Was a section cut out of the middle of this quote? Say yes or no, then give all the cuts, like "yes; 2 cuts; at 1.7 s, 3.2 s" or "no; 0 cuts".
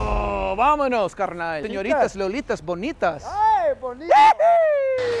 yes; 1 cut; at 1.6 s